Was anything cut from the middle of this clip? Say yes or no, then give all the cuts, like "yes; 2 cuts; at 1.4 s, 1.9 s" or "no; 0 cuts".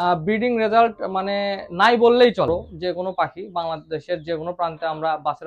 yes; 1 cut; at 2.5 s